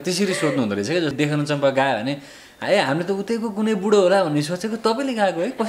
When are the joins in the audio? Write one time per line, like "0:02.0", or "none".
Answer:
0:01.1